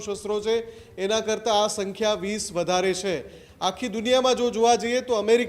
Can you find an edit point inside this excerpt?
no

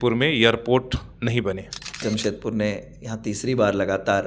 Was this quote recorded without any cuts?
no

